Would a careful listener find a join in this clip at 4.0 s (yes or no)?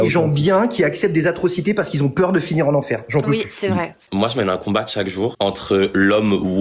yes